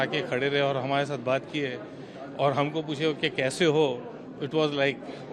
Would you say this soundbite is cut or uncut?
uncut